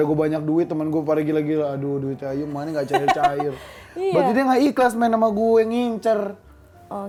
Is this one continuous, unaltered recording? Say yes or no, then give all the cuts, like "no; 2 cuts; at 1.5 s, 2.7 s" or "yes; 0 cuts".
yes; 0 cuts